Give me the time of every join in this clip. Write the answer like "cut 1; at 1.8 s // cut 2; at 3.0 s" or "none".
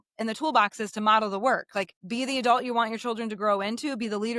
cut 1; at 2.0 s

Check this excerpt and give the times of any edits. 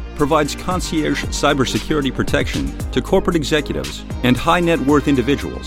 none

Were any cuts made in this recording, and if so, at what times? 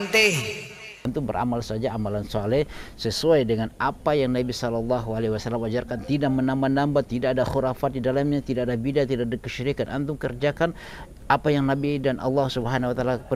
cut 1; at 0.9 s

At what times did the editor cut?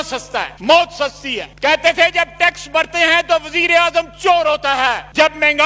cut 1; at 1.5 s

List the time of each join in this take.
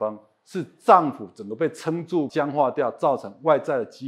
cut 1; at 2.3 s

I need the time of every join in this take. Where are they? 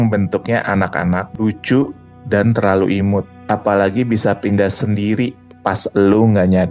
cut 1; at 1.3 s // cut 2; at 3.3 s

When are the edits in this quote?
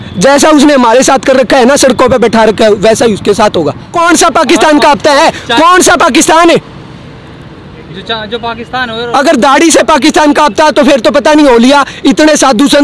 cut 1; at 3.9 s

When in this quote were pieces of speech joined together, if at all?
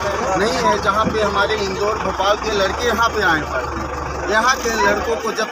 none

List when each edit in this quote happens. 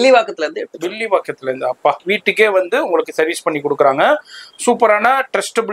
cut 1; at 2.1 s

